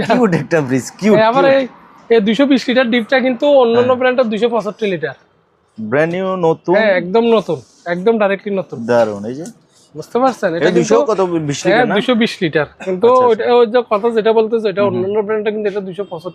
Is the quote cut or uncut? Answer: uncut